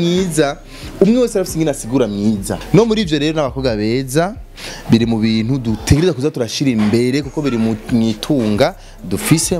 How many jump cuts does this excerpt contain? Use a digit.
1